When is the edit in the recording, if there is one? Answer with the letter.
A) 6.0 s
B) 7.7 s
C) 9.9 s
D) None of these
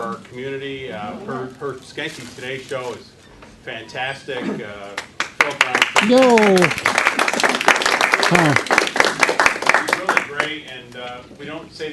D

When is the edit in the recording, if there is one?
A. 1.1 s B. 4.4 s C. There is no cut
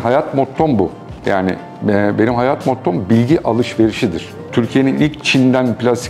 B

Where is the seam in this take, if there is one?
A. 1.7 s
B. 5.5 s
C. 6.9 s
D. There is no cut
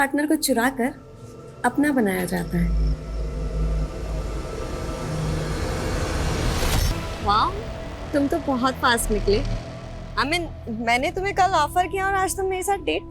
C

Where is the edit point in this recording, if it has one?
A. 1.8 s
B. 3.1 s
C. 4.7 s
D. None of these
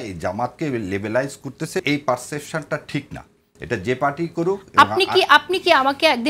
A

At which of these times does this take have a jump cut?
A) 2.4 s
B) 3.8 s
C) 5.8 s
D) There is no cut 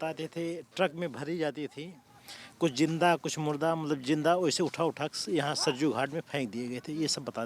D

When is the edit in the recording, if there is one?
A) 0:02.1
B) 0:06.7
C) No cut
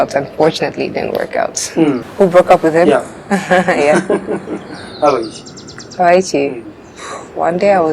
A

